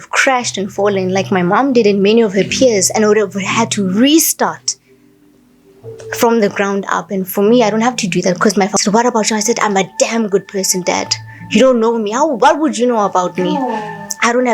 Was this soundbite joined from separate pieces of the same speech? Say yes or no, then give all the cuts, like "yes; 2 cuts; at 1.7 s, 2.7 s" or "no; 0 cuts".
yes; 1 cut; at 8.7 s